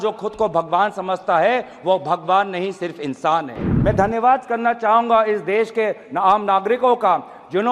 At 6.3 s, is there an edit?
no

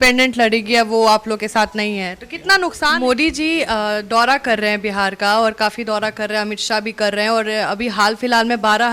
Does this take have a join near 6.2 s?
no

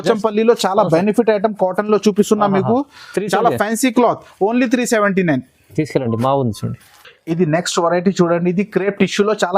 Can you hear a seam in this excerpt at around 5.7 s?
no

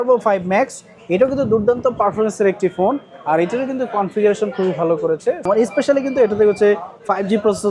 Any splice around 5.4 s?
yes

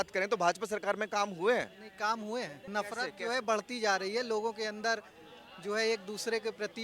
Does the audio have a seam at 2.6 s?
yes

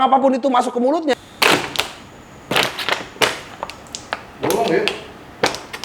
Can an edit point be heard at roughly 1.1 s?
yes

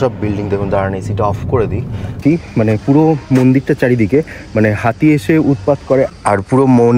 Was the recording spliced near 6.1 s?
yes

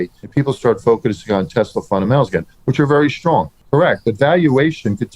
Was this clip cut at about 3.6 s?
yes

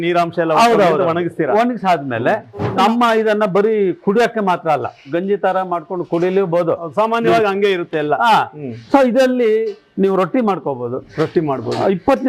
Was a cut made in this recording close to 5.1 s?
yes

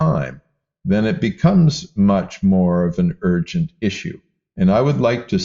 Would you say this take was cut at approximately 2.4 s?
no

